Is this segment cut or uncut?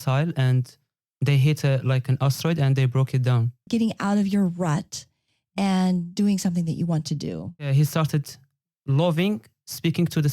cut